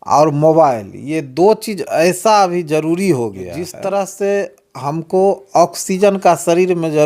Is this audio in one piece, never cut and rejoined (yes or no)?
no